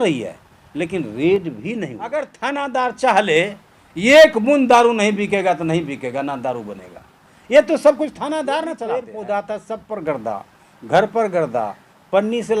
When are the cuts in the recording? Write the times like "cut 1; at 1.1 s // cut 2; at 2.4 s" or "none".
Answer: cut 1; at 2.0 s // cut 2; at 9.0 s